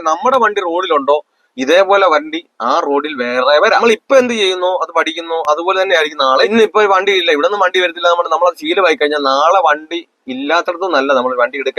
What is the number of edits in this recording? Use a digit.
2